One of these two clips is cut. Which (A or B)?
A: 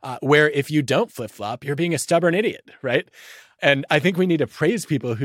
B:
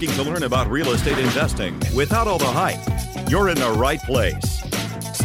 A